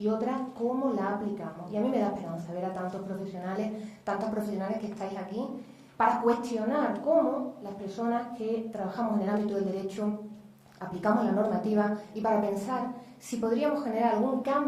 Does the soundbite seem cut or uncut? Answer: uncut